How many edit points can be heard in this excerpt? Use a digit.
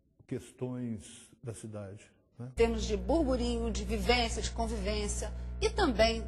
1